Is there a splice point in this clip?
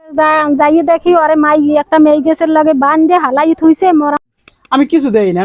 yes; 1 cut; at 4.2 s

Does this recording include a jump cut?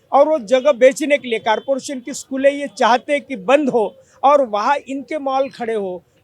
no; 0 cuts

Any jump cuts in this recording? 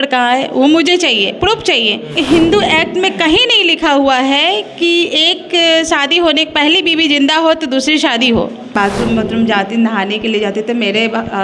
yes; 2 cuts; at 2.1 s, 8.6 s

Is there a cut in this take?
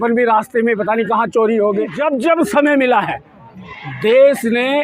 yes; 1 cut; at 2.0 s

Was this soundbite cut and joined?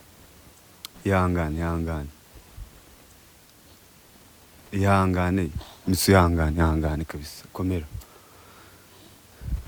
no; 0 cuts

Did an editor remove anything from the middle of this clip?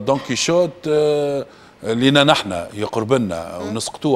no; 0 cuts

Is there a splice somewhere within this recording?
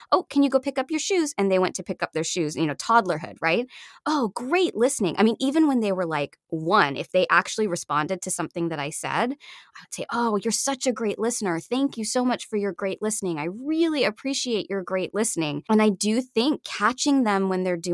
yes; 1 cut; at 15.6 s

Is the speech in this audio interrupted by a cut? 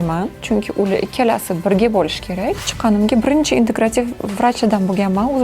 yes; 1 cut; at 2.7 s

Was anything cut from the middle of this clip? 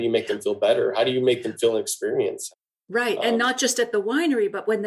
yes; 1 cut; at 2.5 s

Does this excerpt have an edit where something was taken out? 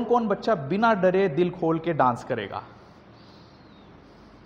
no; 0 cuts

